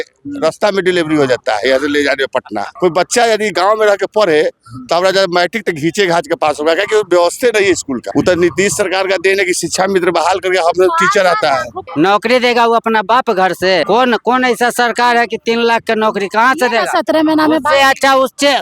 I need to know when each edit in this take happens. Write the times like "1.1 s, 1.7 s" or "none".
2.6 s, 8.1 s, 11.8 s, 13.8 s